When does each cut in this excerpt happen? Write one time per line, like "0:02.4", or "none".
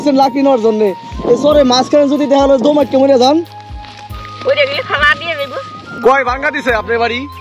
0:05.9